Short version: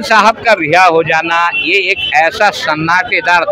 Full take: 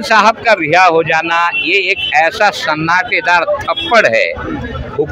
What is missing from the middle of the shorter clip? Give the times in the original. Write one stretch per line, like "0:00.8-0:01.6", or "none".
none